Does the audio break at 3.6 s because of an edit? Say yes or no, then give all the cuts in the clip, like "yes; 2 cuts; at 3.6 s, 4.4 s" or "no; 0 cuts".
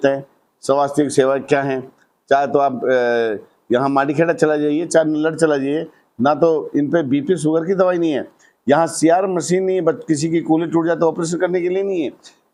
no; 0 cuts